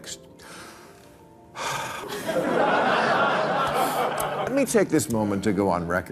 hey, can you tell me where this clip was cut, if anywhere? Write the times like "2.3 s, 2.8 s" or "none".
2.0 s, 4.5 s